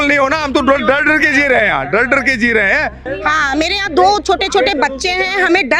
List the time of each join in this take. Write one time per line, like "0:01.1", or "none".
0:03.0